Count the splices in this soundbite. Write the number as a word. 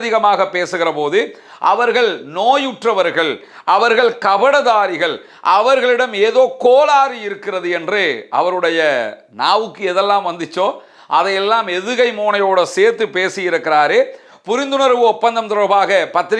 zero